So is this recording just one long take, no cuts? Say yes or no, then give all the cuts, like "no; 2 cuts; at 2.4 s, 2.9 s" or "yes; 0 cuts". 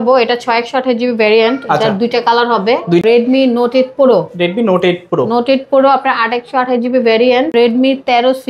no; 2 cuts; at 3.0 s, 7.5 s